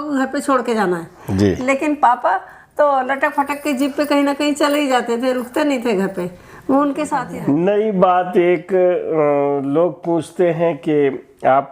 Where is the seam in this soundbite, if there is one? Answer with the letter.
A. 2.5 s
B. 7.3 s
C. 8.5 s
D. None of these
B